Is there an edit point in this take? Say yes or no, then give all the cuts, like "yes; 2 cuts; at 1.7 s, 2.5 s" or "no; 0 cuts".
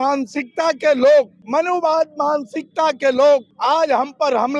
yes; 2 cuts; at 1.4 s, 3.5 s